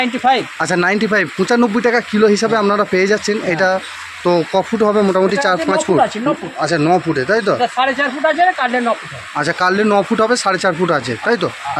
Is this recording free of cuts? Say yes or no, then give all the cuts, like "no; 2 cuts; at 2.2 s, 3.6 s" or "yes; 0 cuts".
yes; 0 cuts